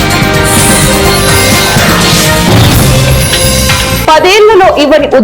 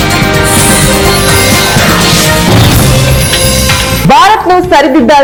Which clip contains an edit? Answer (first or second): first